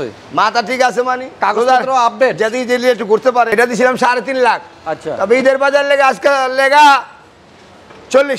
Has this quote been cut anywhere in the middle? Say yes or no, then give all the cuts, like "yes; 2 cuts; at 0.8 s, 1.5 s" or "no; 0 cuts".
yes; 1 cut; at 3.5 s